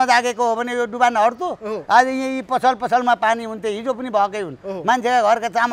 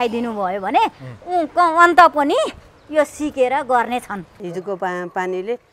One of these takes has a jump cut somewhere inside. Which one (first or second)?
second